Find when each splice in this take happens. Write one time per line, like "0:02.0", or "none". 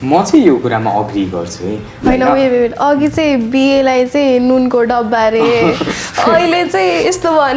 0:01.9

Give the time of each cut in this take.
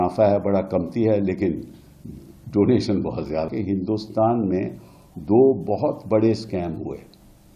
0:03.5

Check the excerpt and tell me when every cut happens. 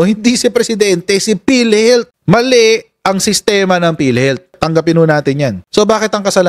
none

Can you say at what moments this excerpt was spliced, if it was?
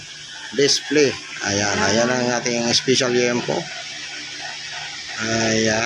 none

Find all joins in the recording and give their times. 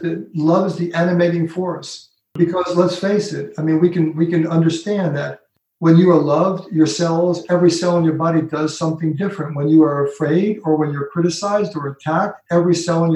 0:02.4

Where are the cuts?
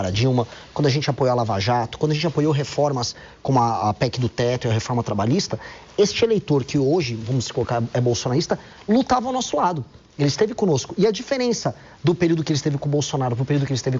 none

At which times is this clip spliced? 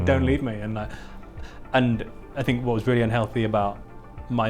0:02.3

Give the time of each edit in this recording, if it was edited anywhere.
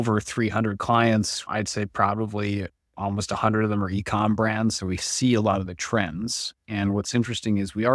0:01.5

